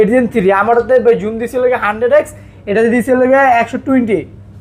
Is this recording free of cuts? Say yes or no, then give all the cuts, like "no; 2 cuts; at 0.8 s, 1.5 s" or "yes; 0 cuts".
yes; 0 cuts